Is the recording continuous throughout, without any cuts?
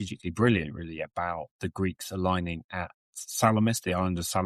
yes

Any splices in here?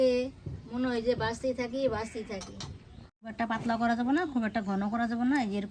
yes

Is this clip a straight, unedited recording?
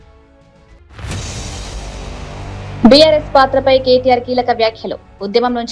no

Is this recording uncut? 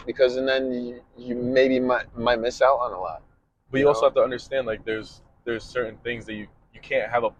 yes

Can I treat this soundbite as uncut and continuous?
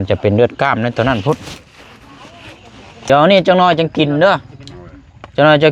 no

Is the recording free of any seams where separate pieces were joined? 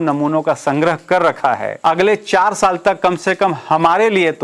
no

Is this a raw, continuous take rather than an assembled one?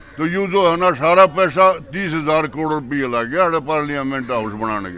yes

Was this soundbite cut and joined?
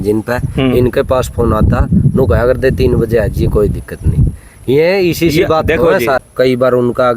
yes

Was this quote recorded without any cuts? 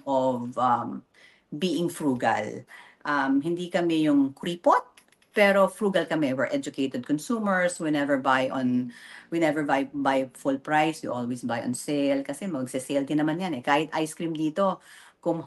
yes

